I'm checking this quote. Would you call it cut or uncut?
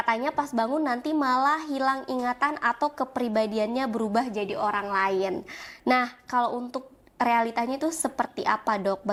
uncut